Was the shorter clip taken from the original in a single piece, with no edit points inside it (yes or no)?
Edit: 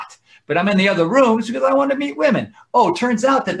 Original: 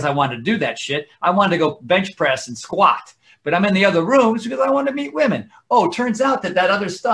yes